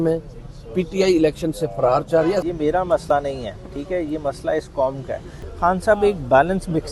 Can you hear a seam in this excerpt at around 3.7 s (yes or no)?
no